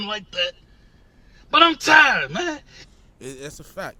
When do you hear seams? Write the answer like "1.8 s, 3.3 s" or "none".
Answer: none